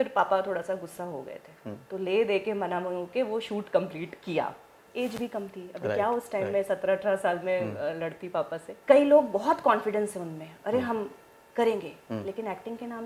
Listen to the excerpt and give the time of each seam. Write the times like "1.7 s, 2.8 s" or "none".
4.8 s, 8.7 s